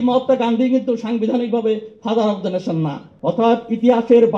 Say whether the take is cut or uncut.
cut